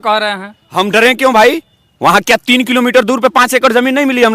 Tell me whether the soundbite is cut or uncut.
uncut